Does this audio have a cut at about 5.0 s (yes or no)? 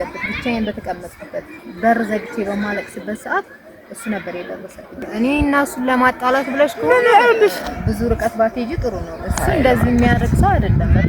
yes